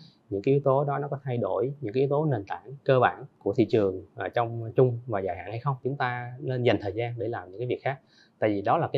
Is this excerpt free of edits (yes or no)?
no